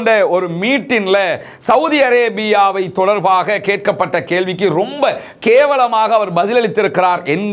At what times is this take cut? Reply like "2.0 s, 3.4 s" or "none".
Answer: none

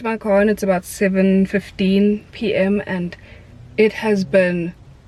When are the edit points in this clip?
none

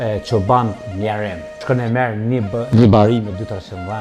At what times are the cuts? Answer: 1.6 s

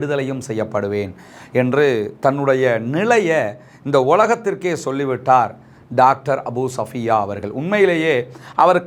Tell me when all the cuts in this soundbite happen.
none

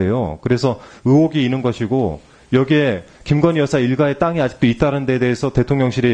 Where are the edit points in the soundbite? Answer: none

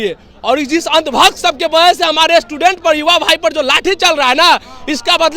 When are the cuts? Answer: none

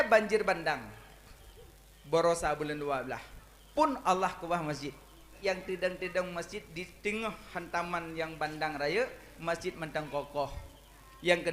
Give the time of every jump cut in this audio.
5.3 s

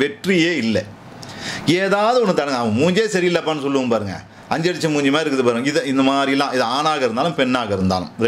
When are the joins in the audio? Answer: none

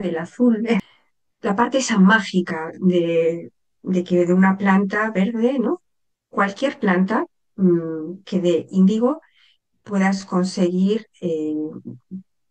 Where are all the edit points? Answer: 0.9 s

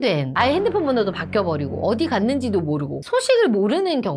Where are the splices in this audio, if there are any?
none

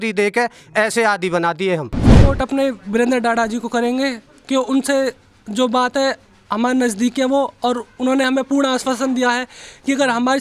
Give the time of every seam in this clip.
2.1 s

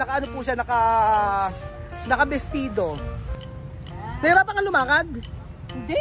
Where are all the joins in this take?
3.1 s

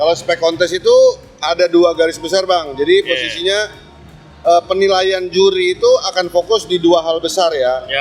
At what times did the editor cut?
none

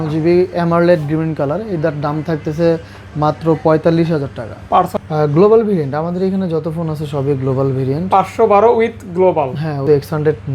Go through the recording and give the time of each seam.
4.9 s, 9.8 s

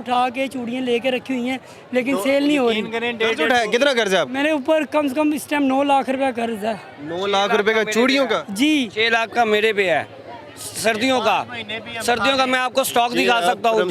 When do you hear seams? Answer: none

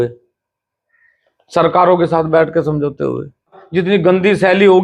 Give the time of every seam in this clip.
3.6 s

